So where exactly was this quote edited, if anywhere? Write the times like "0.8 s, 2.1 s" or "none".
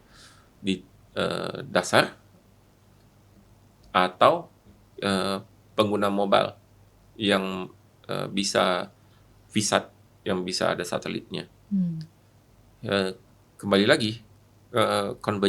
none